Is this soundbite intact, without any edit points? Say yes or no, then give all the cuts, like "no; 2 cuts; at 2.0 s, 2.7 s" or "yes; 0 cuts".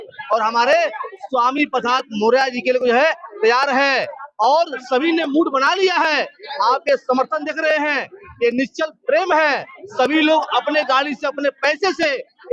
yes; 0 cuts